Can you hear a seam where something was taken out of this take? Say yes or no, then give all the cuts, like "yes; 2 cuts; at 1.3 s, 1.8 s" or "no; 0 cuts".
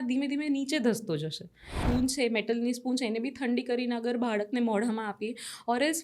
yes; 1 cut; at 1.8 s